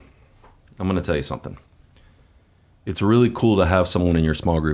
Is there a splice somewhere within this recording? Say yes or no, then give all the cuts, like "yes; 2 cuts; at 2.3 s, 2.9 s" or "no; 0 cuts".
no; 0 cuts